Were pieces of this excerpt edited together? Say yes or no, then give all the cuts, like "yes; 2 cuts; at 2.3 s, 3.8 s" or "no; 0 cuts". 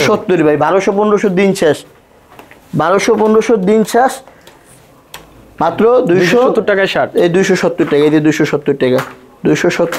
no; 0 cuts